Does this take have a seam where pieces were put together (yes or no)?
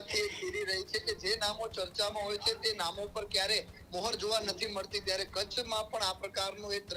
no